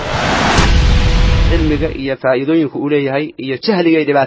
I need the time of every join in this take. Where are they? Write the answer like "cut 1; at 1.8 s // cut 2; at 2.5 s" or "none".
cut 1; at 1.5 s